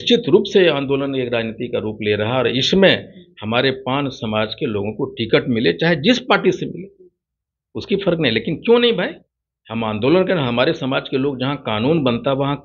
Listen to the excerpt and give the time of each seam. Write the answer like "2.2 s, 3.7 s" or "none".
none